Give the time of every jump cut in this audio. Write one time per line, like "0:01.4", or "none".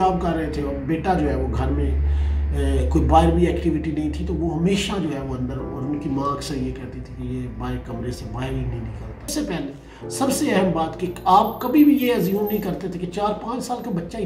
0:09.3